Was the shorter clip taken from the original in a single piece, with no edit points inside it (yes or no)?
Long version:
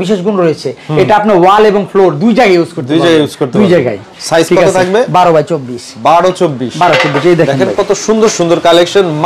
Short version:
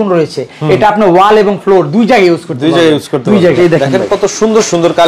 no